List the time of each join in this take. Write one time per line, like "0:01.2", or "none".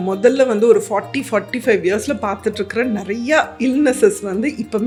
none